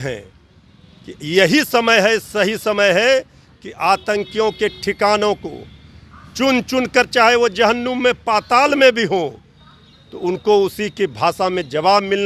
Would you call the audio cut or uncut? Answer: uncut